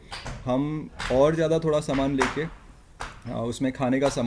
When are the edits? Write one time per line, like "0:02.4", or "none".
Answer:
none